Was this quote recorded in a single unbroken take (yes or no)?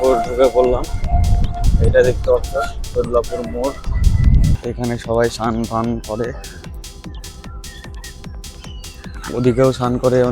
no